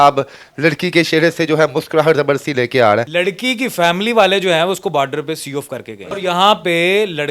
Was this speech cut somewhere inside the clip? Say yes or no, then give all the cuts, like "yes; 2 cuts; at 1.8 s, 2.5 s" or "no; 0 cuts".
yes; 2 cuts; at 3.1 s, 6.2 s